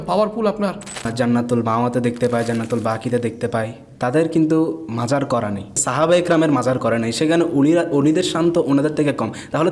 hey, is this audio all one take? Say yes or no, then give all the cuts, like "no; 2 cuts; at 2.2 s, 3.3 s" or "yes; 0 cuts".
no; 2 cuts; at 1.1 s, 5.8 s